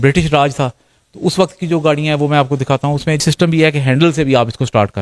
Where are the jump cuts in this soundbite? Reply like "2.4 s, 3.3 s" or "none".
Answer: 3.2 s